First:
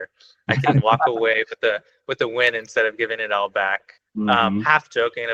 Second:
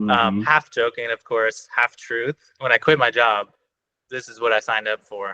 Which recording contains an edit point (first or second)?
second